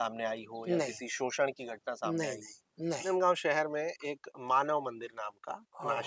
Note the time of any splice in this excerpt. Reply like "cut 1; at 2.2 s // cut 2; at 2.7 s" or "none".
cut 1; at 3.1 s